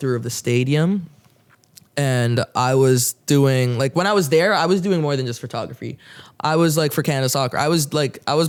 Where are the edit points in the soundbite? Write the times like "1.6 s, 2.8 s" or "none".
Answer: none